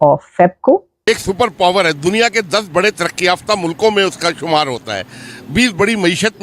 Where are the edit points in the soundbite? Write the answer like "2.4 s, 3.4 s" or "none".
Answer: 0.9 s